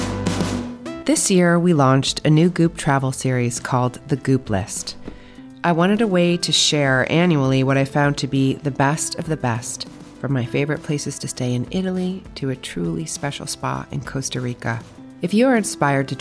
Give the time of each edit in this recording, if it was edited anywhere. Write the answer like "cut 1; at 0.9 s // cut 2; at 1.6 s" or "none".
cut 1; at 1.0 s